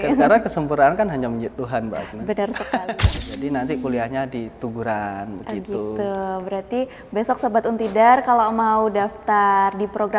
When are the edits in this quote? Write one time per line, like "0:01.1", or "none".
0:02.9